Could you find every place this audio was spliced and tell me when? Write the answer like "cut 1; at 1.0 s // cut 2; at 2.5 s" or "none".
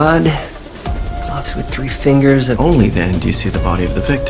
cut 1; at 2.6 s